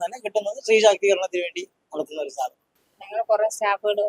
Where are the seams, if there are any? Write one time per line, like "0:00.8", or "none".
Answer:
0:02.7